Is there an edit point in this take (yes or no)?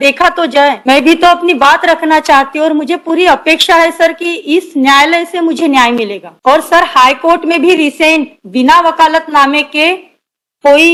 no